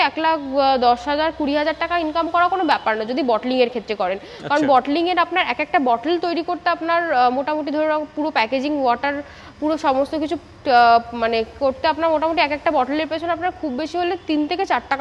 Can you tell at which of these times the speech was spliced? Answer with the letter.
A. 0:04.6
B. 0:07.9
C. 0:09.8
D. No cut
D